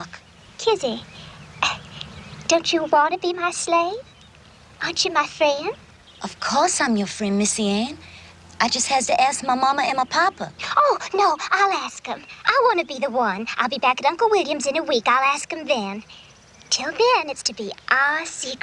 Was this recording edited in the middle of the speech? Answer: no; 0 cuts

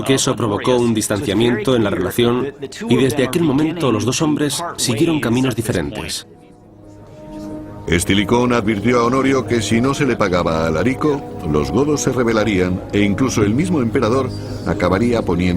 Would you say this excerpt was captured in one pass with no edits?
no; 1 cut; at 13.4 s

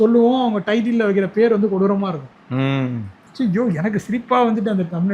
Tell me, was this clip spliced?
yes; 1 cut; at 3.2 s

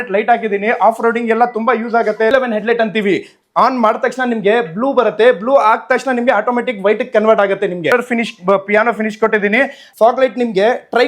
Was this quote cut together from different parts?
yes; 3 cuts; at 2.3 s, 7.9 s, 9.8 s

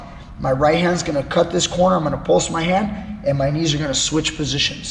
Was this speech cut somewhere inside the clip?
no; 0 cuts

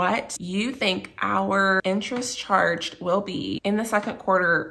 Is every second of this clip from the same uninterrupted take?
no; 2 cuts; at 1.8 s, 3.5 s

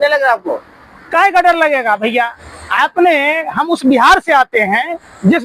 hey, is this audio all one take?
yes; 0 cuts

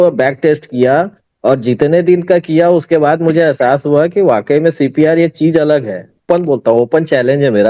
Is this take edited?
yes; 1 cut; at 6.2 s

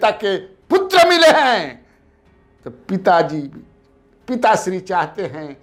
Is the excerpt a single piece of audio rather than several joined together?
yes; 0 cuts

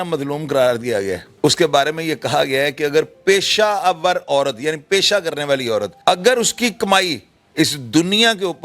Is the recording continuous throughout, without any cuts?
no; 2 cuts; at 1.3 s, 5.9 s

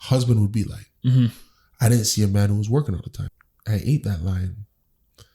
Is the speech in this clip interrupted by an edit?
yes; 1 cut; at 3.2 s

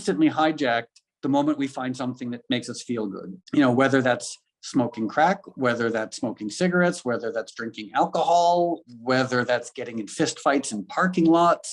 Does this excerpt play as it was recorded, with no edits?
no; 1 cut; at 8.9 s

